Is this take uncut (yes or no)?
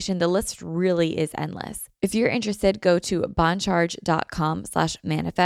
no